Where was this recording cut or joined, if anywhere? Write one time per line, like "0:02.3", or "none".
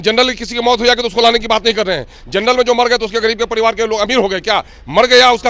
none